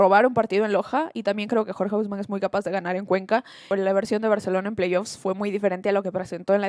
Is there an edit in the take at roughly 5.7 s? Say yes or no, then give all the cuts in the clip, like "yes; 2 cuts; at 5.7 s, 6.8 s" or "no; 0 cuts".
no; 1 cut; at 3.6 s